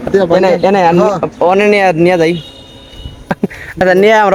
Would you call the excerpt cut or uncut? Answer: uncut